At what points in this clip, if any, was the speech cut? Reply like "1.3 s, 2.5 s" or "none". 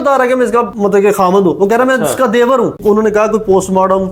2.7 s